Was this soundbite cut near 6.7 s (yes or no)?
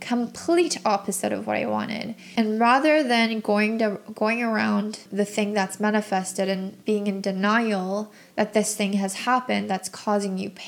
yes